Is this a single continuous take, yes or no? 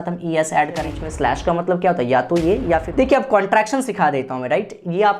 no